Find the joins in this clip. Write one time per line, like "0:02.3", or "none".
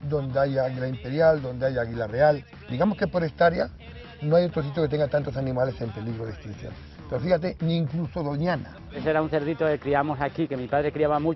0:02.6
0:09.0

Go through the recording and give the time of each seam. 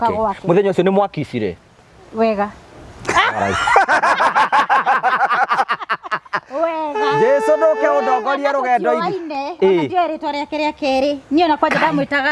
none

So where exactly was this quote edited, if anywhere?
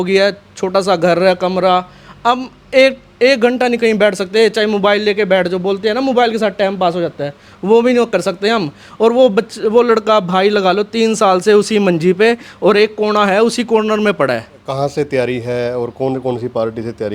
0:14.6

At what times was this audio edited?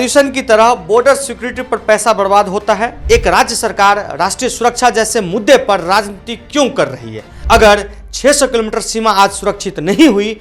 0:03.0

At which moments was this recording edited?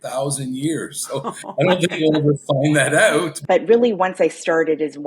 0:03.3

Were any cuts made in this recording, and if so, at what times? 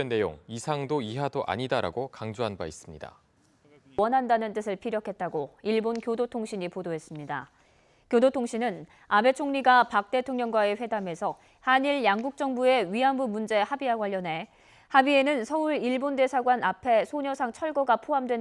0:13.2

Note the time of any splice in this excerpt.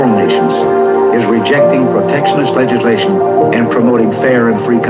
none

